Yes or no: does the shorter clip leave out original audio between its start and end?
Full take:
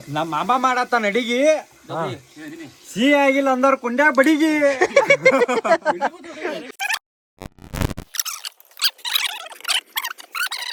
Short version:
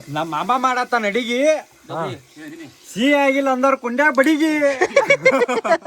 no